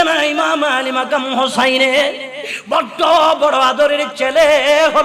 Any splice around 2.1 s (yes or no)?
no